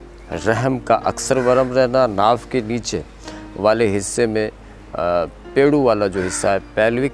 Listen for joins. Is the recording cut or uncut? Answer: uncut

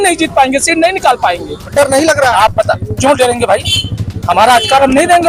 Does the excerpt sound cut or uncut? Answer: cut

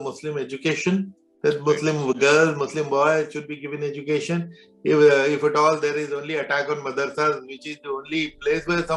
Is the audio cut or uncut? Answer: uncut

